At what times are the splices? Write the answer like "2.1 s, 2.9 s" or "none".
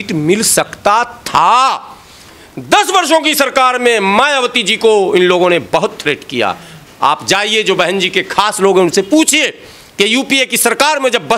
none